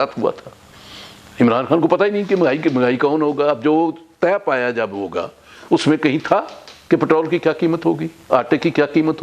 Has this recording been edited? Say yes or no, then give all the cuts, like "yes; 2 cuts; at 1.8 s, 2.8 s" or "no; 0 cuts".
no; 0 cuts